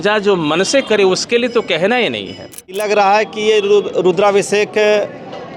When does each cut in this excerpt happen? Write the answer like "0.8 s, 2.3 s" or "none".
2.8 s